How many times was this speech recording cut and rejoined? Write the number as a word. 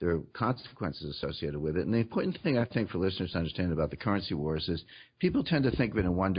zero